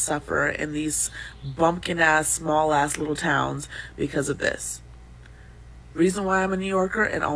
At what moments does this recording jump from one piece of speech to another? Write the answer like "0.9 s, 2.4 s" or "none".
4.2 s